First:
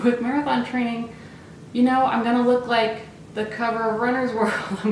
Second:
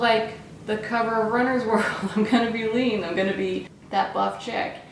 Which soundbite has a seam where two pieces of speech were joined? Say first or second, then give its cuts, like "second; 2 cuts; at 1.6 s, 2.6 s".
second; 1 cut; at 3.8 s